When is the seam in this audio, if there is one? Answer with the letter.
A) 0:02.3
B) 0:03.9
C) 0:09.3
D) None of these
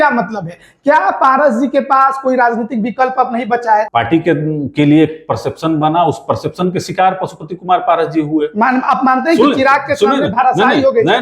B